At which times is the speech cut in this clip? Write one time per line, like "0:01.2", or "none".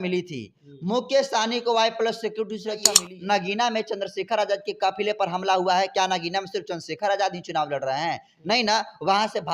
0:03.0

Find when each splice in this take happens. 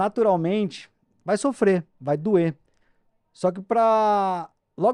none

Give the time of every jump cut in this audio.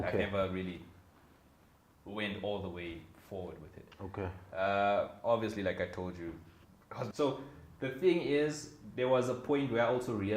0:07.1

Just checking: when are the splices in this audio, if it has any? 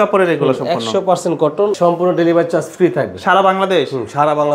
0:01.8

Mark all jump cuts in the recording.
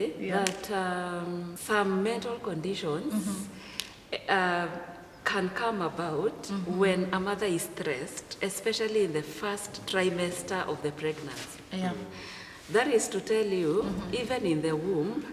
0:01.6

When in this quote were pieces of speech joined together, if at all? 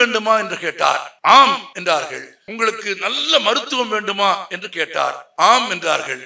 0:01.1
0:01.9
0:05.2

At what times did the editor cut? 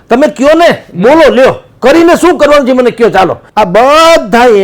0:03.4

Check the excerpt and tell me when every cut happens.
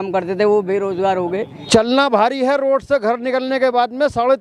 0:01.5

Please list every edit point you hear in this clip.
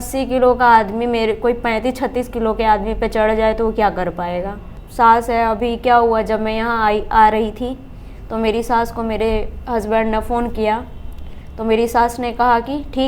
0:04.8

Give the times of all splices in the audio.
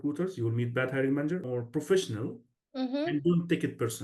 0:01.5

